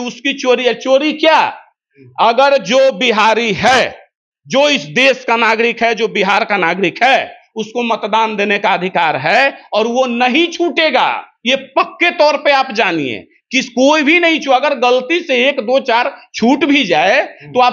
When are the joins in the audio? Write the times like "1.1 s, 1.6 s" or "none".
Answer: none